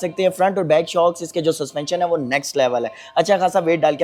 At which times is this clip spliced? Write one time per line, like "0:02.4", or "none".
none